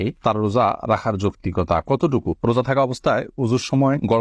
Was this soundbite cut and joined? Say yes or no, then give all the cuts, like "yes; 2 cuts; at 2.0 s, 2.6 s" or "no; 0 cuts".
yes; 1 cut; at 2.3 s